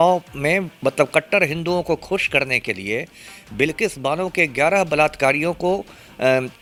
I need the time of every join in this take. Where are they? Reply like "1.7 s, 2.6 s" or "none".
none